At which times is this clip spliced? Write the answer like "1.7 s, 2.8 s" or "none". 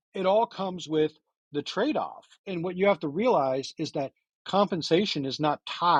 none